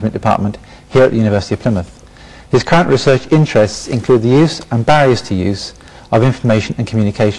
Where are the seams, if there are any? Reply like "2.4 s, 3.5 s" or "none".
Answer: none